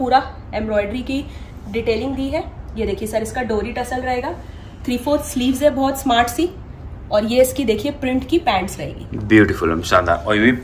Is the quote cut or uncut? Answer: uncut